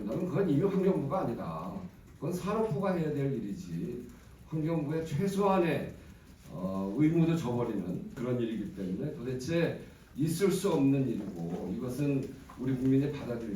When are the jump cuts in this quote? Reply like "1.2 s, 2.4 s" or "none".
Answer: 8.2 s